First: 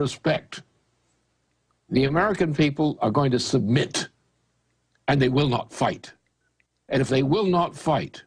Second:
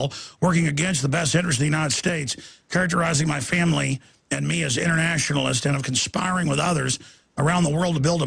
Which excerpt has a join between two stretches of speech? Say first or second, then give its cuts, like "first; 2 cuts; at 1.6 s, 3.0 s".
first; 1 cut; at 3.2 s